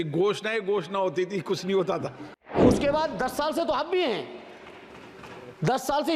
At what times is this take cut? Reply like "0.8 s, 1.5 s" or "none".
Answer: 2.6 s